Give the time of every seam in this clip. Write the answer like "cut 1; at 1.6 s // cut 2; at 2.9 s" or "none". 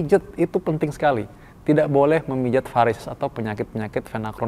none